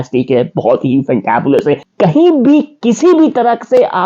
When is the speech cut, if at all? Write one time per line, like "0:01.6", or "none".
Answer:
0:01.9

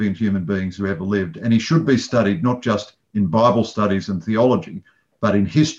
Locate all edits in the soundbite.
none

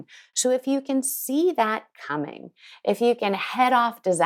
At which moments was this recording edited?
none

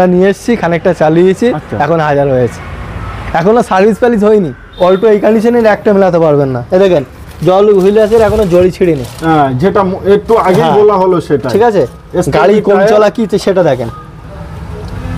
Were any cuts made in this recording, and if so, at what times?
0:04.6

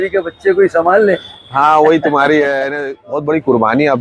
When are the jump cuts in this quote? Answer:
0:02.7

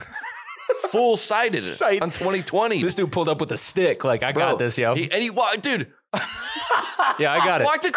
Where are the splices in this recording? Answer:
0:02.0

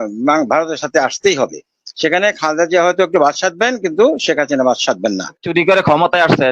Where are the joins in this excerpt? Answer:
0:05.4

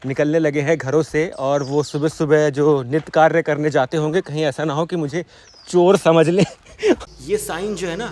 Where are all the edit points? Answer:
0:07.1

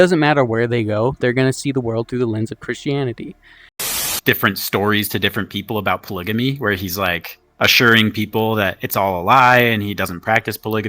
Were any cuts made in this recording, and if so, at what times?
0:03.9

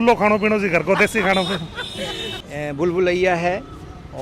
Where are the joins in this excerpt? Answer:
0:02.4

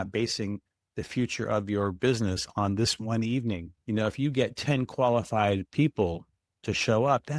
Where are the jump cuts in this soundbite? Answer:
0:03.7

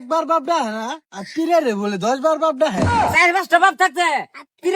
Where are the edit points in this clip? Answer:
0:02.9

